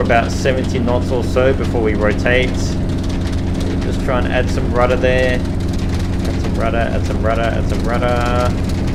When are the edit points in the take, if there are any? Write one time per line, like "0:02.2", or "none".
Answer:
none

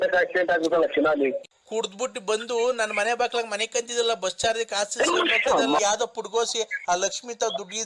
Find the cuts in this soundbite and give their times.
0:01.5
0:05.8

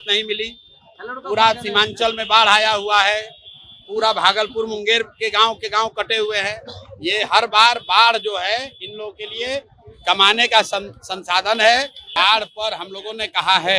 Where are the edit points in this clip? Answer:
0:12.2

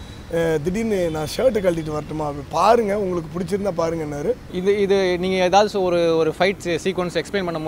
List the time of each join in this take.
0:04.5

